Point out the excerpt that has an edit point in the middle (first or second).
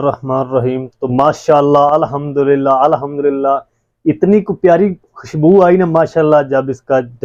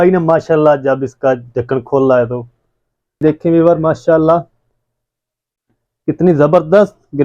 second